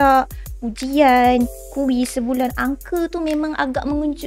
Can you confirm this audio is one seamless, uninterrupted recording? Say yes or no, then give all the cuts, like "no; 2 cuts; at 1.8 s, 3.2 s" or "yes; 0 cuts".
yes; 0 cuts